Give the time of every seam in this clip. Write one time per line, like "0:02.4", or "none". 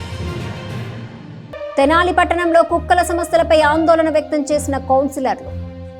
0:01.0